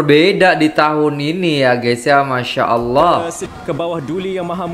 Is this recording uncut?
no; 1 cut; at 3.4 s

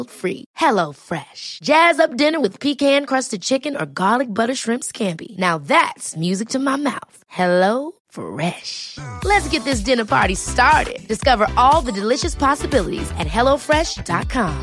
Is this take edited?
no; 0 cuts

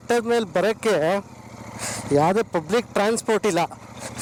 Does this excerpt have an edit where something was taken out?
no; 0 cuts

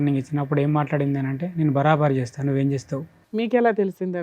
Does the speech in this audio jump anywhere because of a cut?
yes; 1 cut; at 3.1 s

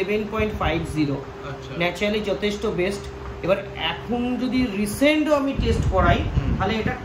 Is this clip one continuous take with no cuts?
yes; 0 cuts

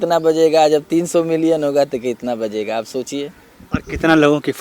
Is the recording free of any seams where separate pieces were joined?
yes; 0 cuts

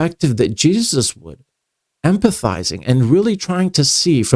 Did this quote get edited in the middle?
no; 0 cuts

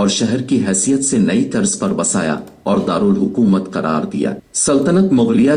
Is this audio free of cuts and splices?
no; 1 cut; at 4.5 s

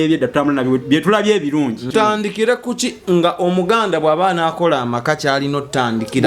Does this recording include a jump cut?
yes; 1 cut; at 1.9 s

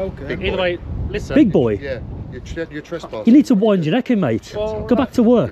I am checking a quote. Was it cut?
no; 0 cuts

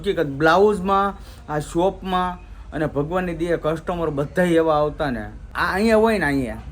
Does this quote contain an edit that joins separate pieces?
yes; 1 cut; at 5.6 s

